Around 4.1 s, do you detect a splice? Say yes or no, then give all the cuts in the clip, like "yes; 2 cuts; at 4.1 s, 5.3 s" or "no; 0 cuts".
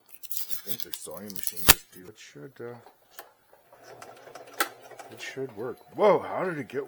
no; 1 cut; at 2.1 s